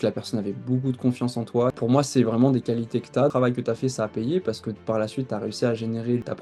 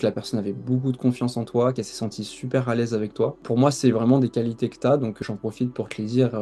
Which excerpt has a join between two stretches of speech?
first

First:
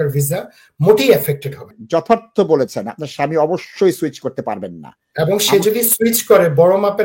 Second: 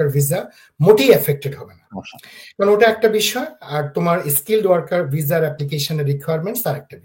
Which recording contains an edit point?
first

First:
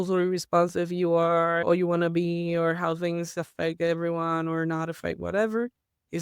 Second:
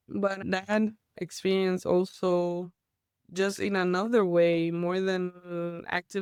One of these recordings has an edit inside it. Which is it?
first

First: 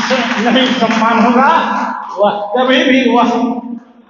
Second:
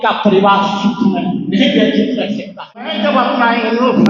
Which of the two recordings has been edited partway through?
second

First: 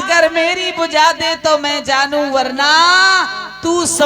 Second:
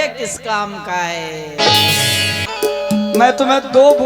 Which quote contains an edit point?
second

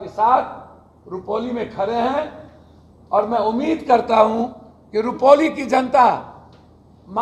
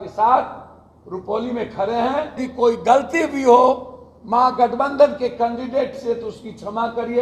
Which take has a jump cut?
second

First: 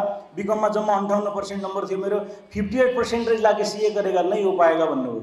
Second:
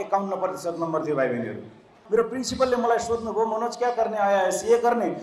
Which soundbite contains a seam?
second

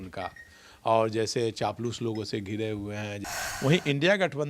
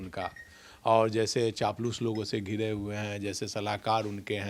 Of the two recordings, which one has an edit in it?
first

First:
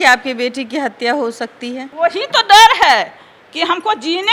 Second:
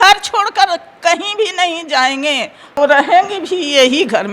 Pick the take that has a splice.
second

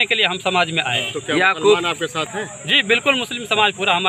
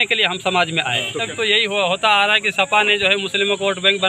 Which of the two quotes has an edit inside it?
second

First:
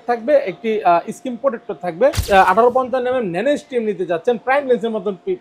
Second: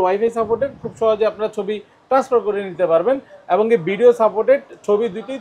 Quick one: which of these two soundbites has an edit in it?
first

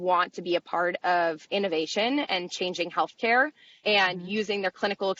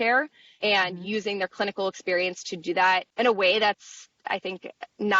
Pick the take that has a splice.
second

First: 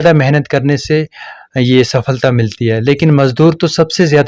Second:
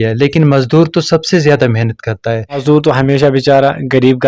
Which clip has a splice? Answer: second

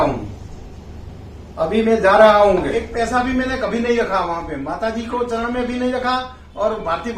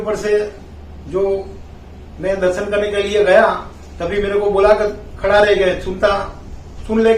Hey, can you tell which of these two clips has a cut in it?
first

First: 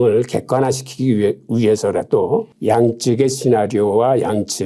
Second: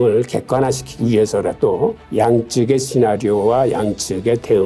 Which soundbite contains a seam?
second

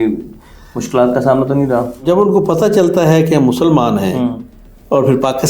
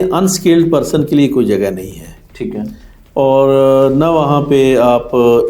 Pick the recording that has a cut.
first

